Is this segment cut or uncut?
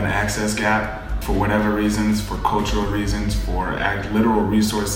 cut